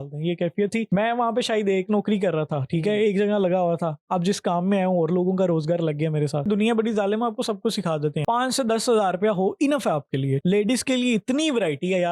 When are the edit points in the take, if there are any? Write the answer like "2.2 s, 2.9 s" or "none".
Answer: 0.9 s, 6.5 s, 8.2 s